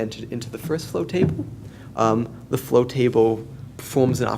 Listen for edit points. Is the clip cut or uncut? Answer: cut